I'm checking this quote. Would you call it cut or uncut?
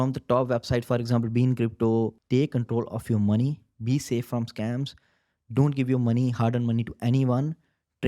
cut